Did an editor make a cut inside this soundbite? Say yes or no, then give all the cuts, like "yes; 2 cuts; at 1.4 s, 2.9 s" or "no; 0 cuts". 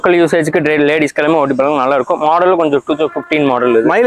no; 0 cuts